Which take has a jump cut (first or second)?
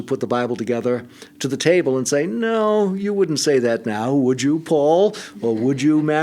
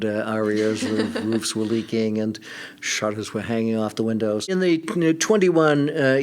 second